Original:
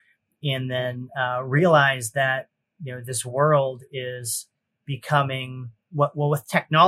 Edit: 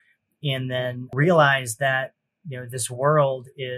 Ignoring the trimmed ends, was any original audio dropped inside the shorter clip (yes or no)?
yes